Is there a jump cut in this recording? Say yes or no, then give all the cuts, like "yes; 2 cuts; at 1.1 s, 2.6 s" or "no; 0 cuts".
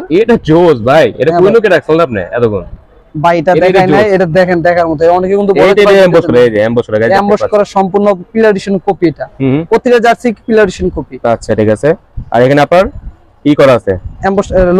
no; 0 cuts